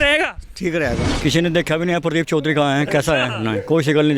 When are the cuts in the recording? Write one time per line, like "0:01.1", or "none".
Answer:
0:01.1